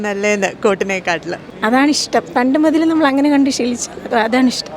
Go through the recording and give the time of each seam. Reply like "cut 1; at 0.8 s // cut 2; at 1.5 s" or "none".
cut 1; at 1.4 s